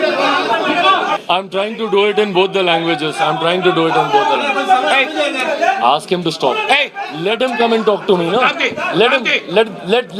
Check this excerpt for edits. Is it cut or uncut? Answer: cut